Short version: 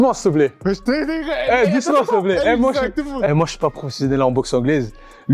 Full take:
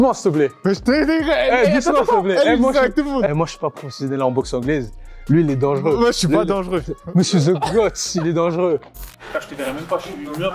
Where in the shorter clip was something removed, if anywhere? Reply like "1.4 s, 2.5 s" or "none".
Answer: none

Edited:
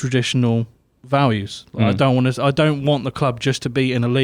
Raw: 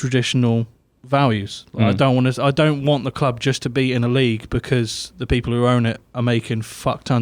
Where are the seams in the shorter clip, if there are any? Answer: none

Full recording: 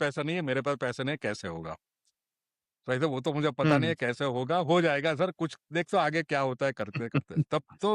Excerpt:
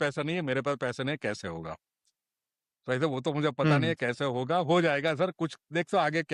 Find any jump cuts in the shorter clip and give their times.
none

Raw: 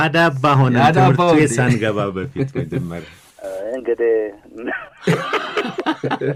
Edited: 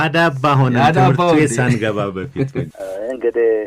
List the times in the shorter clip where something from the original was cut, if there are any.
2.7 s

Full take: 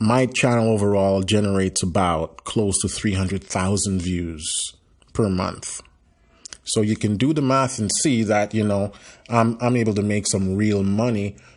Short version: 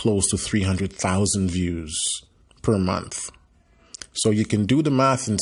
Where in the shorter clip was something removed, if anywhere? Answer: none

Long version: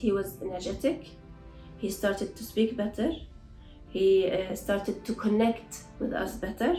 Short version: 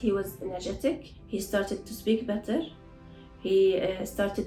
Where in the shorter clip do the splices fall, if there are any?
1.1 s

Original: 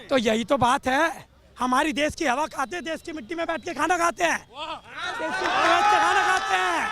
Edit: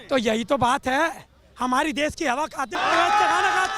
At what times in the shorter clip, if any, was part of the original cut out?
2.8 s

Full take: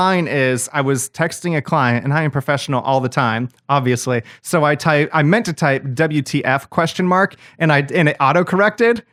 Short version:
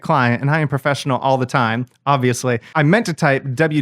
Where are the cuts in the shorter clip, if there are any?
2.7 s

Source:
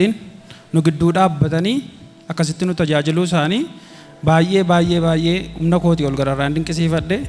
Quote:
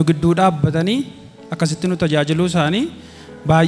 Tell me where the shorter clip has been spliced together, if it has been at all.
none

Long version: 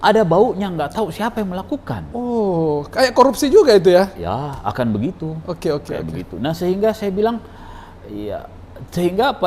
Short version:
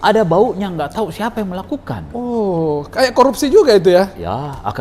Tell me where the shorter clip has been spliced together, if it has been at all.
none

